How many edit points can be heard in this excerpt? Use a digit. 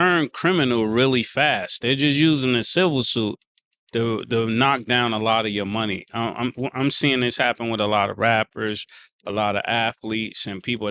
0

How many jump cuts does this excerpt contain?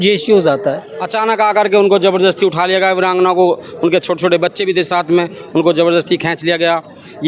1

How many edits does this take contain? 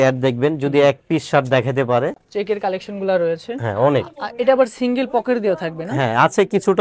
1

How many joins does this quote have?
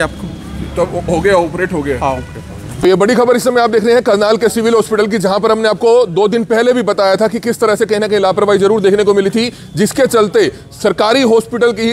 1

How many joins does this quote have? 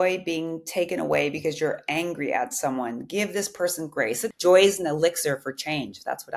1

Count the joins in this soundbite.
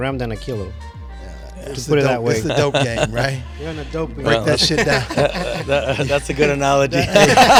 0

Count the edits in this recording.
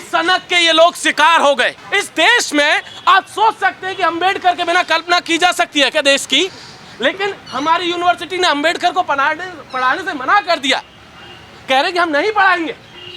1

